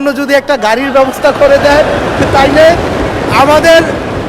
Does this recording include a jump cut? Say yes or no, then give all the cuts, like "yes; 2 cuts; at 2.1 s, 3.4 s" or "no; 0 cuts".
no; 0 cuts